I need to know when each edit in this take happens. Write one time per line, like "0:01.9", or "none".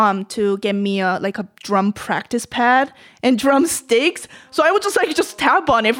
none